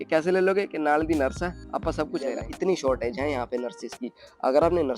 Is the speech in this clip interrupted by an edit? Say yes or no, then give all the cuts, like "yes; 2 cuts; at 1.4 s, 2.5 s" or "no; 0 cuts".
yes; 1 cut; at 2.4 s